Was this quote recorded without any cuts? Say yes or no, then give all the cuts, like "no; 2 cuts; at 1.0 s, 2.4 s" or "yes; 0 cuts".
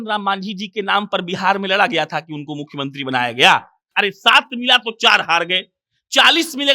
no; 1 cut; at 3.9 s